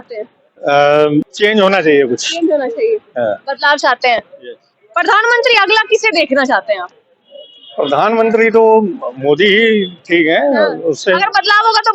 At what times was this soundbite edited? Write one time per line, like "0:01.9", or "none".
0:01.3